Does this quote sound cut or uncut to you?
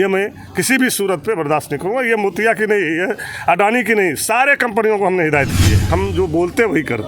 cut